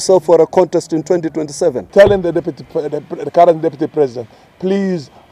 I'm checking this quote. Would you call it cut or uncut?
cut